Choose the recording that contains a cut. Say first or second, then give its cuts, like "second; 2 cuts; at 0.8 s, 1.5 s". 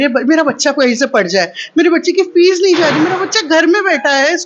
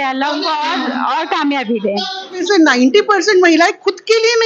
second; 1 cut; at 2.4 s